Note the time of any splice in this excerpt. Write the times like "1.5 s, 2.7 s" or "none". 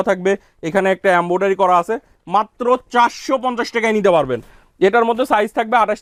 none